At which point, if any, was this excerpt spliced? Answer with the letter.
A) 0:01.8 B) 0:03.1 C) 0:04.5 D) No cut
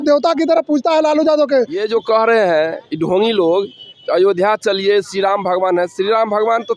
A